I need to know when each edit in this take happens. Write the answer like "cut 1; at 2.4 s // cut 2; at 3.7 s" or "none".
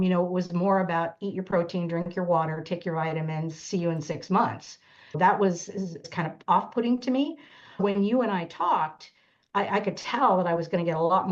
cut 1; at 5.1 s // cut 2; at 6.1 s // cut 3; at 7.8 s